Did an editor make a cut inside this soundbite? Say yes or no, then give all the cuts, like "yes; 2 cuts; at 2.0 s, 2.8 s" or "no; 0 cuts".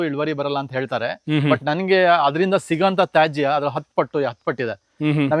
no; 0 cuts